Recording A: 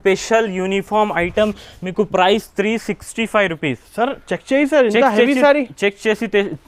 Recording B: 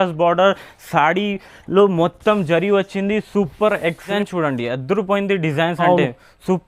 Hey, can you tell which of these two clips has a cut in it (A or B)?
B